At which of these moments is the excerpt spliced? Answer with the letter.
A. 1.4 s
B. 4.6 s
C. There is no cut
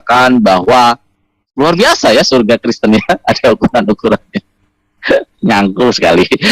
A